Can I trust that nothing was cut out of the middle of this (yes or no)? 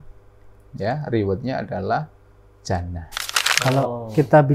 no